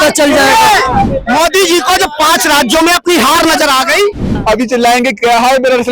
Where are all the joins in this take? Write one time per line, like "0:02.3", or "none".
0:01.1
0:04.2